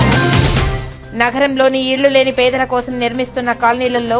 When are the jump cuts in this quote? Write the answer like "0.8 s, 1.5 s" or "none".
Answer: 0.9 s